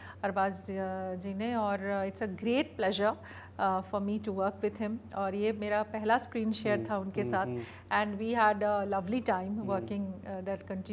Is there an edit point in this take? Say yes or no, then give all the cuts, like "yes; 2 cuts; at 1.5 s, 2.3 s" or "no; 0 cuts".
no; 0 cuts